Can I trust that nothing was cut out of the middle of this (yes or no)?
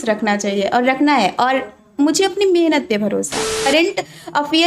no